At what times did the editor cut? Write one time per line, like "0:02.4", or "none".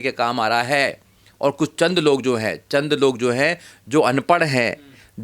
none